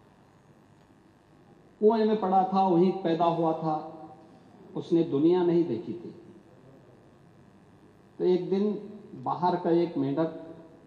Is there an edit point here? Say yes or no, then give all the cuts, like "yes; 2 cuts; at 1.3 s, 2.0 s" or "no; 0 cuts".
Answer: no; 0 cuts